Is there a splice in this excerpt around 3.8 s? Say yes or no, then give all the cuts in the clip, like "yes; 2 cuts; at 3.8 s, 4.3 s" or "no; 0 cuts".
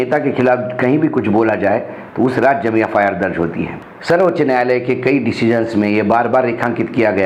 no; 0 cuts